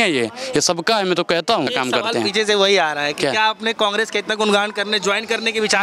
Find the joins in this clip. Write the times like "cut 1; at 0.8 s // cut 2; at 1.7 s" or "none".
none